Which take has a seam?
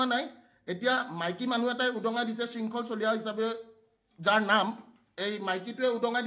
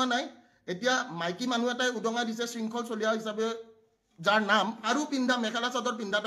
second; 1 cut; at 4.8 s

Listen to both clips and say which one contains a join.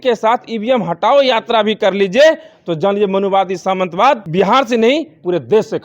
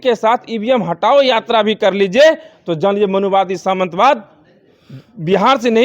first; 1 cut; at 4.3 s

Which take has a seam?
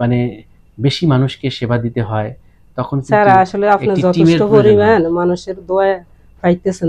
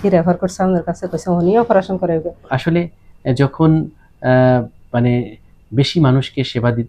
second; 1 cut; at 2.4 s

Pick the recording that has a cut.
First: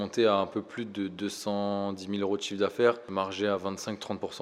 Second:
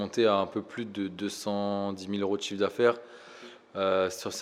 first; 1 cut; at 3.1 s

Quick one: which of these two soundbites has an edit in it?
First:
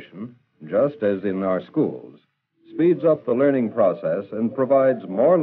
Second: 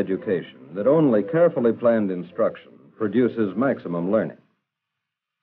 first; 1 cut; at 3.4 s

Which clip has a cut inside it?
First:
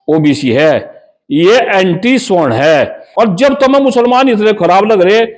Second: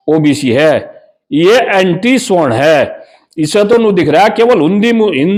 first; 1 cut; at 3.0 s

